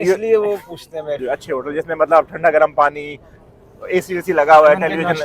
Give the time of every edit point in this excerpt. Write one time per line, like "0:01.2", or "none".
0:01.2